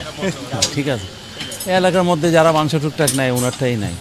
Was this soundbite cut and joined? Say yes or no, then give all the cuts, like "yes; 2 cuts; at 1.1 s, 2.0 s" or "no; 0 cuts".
no; 0 cuts